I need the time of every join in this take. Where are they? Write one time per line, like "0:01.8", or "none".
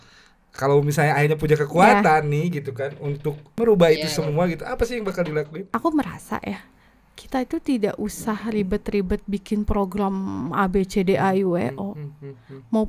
0:03.4
0:05.7

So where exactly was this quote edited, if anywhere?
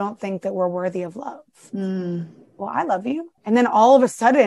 0:03.3

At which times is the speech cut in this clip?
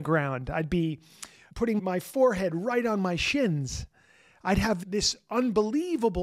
0:01.8
0:04.8

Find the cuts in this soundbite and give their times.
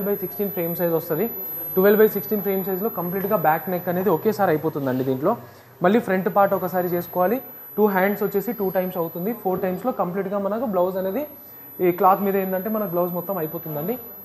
none

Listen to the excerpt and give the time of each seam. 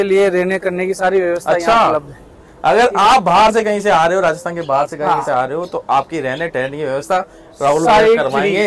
none

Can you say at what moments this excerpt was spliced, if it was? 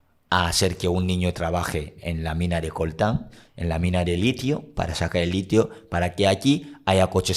none

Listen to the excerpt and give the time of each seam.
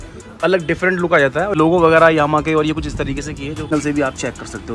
0:01.6
0:03.7

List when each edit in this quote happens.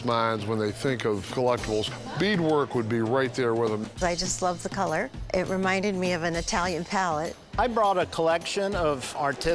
0:01.9
0:03.9
0:05.2
0:07.5

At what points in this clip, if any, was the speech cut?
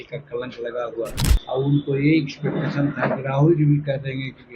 0:01.3

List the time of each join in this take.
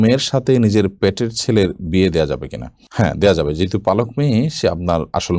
none

